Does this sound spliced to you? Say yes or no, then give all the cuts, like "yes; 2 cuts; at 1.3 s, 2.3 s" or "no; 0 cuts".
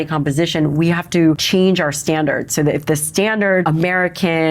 yes; 2 cuts; at 1.4 s, 3.7 s